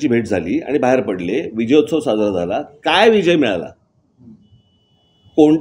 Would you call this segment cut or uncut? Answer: uncut